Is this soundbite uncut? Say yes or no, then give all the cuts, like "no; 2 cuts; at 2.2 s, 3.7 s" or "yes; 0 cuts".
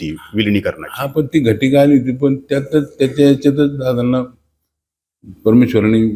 yes; 0 cuts